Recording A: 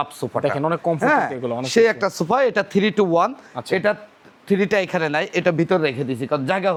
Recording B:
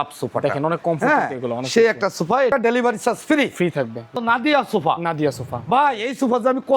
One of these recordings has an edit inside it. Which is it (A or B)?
B